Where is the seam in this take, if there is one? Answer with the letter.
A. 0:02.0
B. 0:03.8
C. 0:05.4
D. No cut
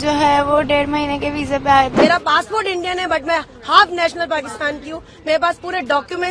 A